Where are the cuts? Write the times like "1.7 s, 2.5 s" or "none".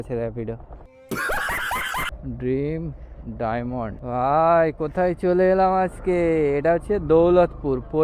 2.1 s, 4.0 s